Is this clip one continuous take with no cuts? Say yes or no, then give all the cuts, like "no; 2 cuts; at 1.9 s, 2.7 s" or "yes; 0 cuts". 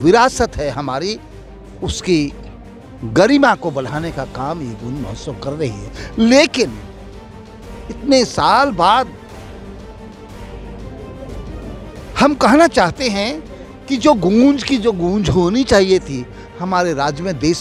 yes; 0 cuts